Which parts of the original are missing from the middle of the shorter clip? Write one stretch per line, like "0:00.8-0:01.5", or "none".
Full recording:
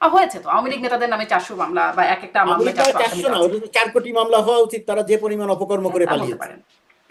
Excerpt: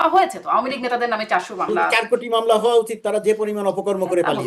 0:01.9-0:03.7